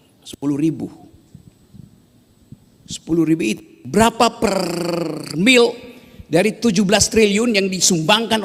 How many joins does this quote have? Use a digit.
0